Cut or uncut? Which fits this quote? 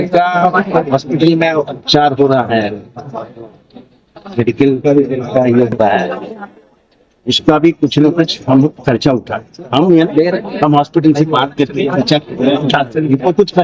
uncut